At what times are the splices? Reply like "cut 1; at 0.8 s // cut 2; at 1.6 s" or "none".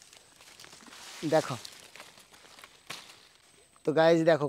cut 1; at 3.5 s